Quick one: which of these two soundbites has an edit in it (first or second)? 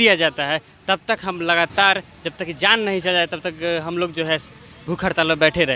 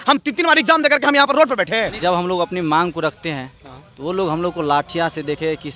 second